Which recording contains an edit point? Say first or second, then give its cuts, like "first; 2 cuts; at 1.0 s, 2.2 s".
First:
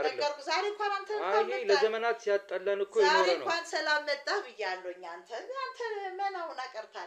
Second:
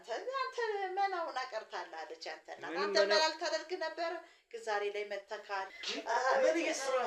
second; 1 cut; at 5.8 s